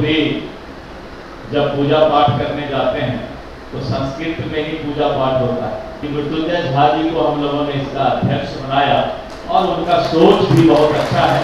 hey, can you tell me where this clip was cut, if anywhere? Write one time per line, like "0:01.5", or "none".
0:05.9